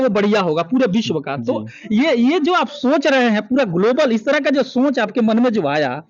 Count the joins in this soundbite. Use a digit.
0